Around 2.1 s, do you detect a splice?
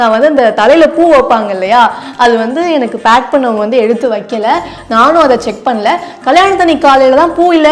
no; 0 cuts

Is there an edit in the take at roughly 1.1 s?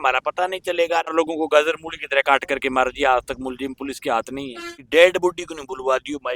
yes; 2 cuts; at 1.1 s, 4.9 s

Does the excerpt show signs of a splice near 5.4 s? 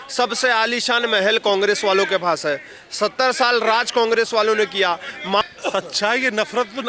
yes; 1 cut; at 5.4 s

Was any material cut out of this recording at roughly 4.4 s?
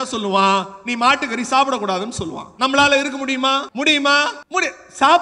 yes; 2 cuts; at 3.7 s, 4.4 s

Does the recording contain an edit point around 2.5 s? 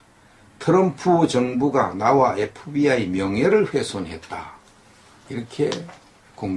no; 1 cut; at 5.5 s

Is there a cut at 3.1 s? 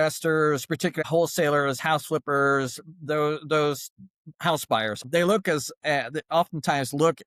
no; 2 cuts; at 1.0 s, 5.0 s

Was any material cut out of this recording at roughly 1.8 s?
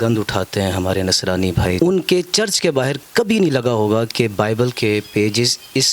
yes; 1 cut; at 1.8 s

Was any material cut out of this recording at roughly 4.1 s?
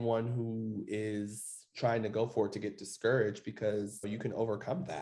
yes; 1 cut; at 4.1 s

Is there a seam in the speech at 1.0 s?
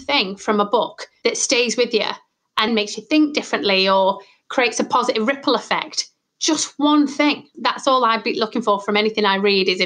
yes; 3 cuts; at 1.0 s, 2.7 s, 7.5 s

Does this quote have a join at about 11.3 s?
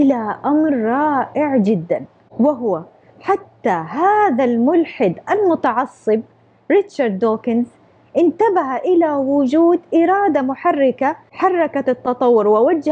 yes; 1 cut; at 11.3 s

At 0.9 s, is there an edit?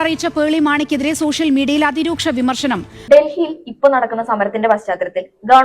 no; 1 cut; at 2.9 s

